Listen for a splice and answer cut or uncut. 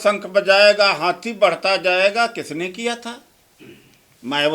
uncut